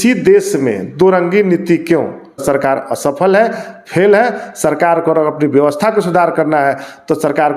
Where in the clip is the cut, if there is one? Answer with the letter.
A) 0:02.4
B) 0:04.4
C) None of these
A